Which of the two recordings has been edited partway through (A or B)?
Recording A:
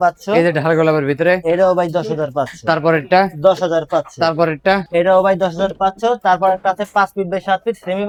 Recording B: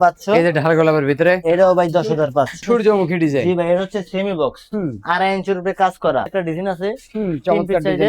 B